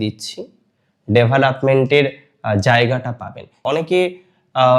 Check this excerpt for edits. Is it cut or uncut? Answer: cut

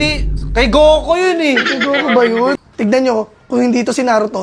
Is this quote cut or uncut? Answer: cut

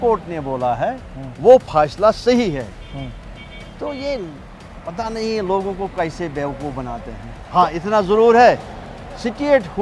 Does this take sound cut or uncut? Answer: uncut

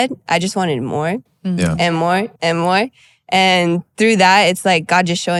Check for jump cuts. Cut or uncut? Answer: uncut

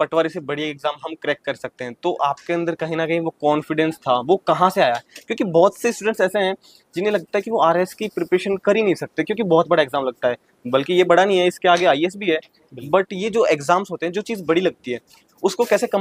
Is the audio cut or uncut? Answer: uncut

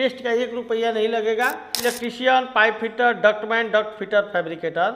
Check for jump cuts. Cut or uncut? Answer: cut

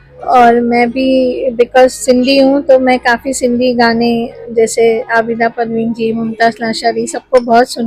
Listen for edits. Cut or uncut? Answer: uncut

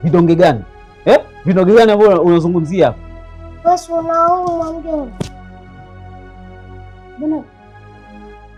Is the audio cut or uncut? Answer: uncut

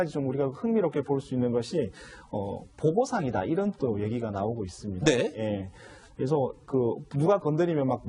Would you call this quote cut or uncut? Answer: uncut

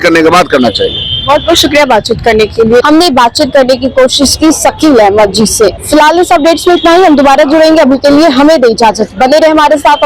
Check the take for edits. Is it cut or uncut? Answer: uncut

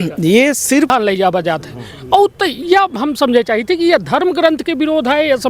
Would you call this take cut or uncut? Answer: cut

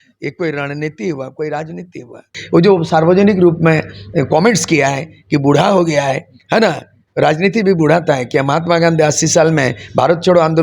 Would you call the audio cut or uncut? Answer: cut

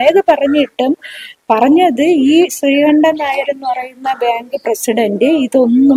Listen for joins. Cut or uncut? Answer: uncut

